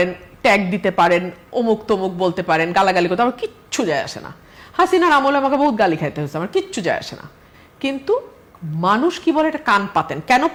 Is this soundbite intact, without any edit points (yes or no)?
yes